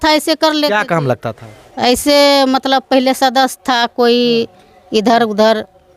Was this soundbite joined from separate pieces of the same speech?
no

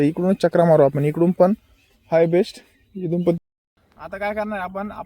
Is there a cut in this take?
yes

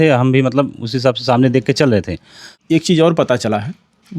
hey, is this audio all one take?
no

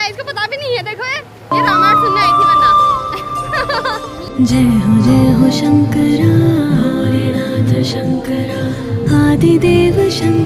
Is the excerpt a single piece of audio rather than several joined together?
no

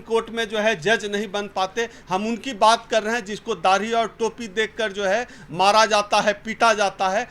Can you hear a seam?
no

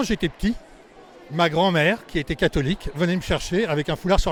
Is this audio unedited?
yes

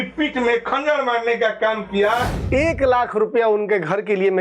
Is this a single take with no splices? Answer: no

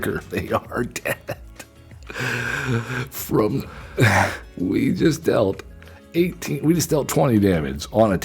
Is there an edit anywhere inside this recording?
yes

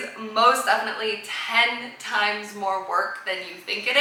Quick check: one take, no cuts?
yes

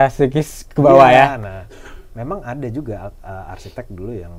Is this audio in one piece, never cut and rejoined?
yes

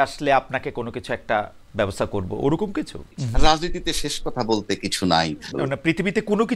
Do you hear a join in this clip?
yes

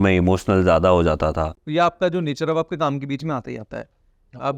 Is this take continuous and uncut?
no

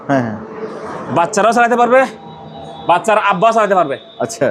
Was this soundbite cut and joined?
no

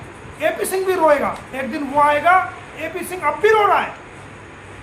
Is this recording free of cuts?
yes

